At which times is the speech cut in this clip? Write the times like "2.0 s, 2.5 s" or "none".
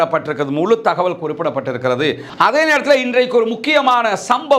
2.3 s